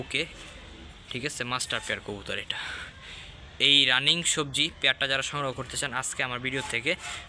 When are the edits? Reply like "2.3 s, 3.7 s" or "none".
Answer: none